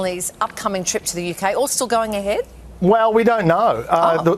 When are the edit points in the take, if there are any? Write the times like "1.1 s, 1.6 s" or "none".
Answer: none